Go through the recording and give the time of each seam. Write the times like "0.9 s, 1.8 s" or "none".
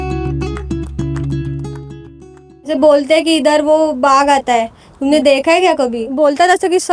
2.5 s, 6.0 s